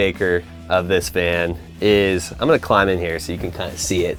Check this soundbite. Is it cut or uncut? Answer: uncut